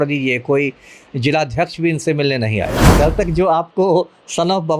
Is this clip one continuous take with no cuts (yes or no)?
no